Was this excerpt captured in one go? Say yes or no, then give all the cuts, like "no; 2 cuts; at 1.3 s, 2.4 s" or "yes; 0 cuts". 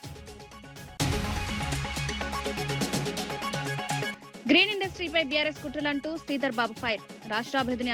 no; 3 cuts; at 0.9 s, 2.5 s, 4.2 s